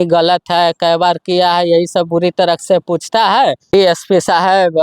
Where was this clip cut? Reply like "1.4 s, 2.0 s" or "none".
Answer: 3.9 s